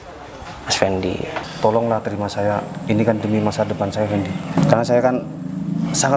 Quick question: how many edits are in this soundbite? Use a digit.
2